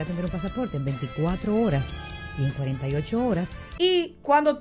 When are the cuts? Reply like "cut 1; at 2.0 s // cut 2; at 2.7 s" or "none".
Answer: cut 1; at 3.6 s